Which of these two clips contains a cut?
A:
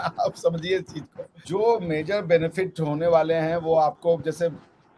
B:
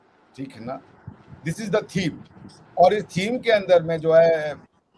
A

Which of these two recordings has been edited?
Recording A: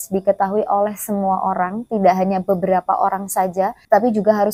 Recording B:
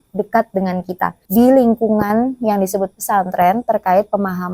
B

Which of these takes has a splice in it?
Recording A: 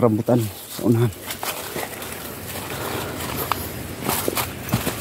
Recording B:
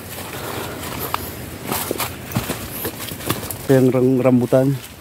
B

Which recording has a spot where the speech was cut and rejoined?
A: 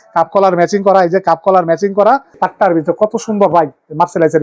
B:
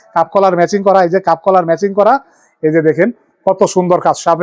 A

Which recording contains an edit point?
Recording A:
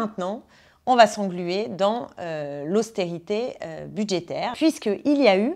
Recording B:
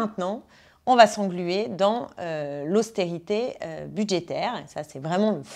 A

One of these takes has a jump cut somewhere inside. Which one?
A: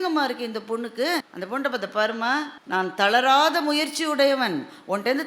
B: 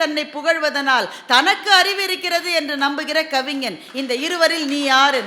A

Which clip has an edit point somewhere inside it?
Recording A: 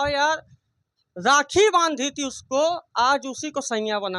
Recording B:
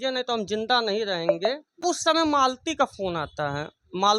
B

